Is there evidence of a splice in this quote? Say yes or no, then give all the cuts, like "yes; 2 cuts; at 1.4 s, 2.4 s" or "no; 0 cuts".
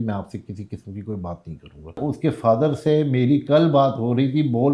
yes; 1 cut; at 2.0 s